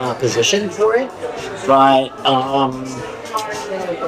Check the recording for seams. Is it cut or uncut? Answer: uncut